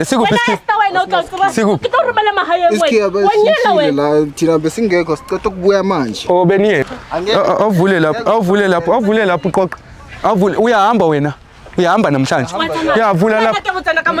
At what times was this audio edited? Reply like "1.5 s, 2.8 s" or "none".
7.0 s

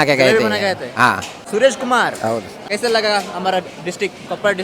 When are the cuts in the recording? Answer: 1.3 s, 2.6 s

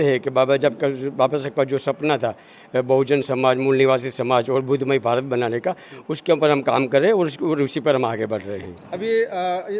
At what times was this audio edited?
none

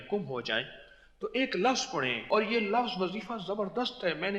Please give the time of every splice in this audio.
2.3 s

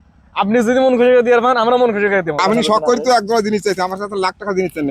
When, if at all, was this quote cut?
2.4 s

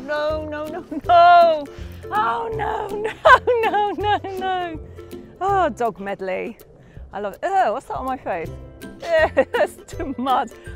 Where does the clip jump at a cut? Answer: none

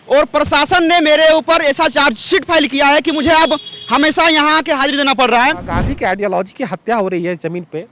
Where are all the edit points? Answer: 5.7 s

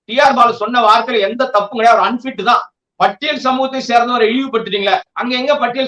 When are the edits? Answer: 2.8 s

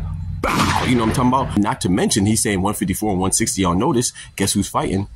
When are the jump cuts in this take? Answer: 1.6 s

